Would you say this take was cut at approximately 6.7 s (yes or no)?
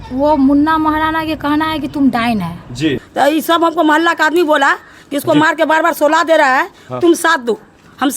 no